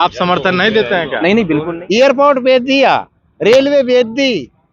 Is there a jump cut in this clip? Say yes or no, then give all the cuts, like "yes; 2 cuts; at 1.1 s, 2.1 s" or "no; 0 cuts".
yes; 1 cut; at 1.7 s